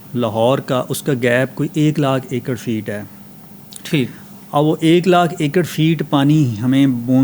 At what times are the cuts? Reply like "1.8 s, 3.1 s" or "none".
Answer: none